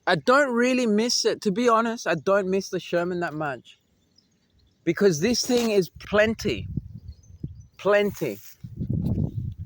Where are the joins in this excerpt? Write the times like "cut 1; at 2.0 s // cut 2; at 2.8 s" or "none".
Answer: cut 1; at 5.9 s